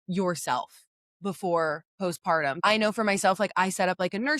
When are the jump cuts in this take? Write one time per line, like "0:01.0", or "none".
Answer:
0:02.6